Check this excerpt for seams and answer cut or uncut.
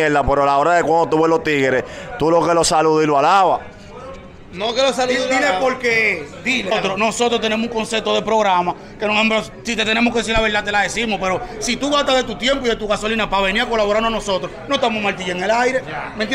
uncut